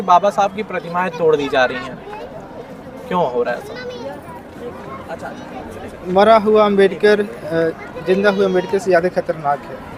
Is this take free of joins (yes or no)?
yes